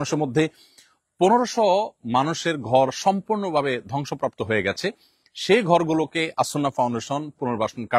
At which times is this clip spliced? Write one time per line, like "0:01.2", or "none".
none